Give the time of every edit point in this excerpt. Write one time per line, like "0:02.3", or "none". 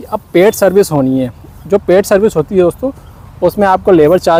none